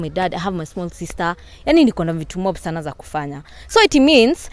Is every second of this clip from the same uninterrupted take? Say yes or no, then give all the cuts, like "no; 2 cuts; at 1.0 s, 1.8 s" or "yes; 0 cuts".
no; 1 cut; at 3.5 s